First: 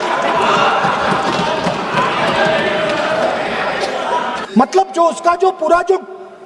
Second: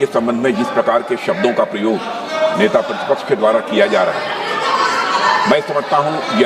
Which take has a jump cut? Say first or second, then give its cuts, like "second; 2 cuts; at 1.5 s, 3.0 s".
first; 1 cut; at 4.4 s